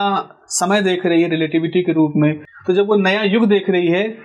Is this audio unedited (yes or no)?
no